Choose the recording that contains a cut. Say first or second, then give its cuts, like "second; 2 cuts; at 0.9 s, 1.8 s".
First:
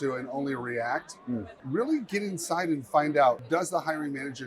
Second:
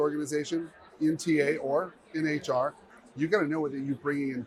first; 2 cuts; at 1.5 s, 3.4 s